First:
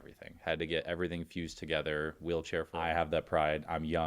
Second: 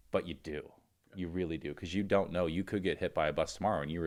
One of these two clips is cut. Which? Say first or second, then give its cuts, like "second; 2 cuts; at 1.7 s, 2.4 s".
first; 1 cut; at 2.7 s